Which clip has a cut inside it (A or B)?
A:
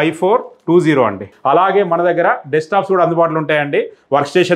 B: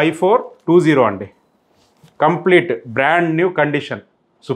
A